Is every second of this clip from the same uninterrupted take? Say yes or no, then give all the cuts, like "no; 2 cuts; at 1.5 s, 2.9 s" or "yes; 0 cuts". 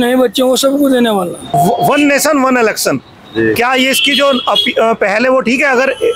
no; 1 cut; at 1.4 s